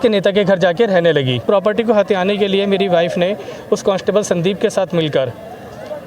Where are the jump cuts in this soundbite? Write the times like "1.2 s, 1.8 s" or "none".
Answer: 1.4 s